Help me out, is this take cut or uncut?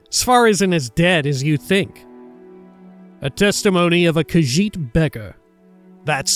cut